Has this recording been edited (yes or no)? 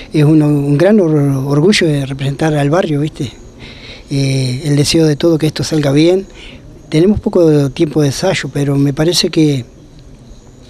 no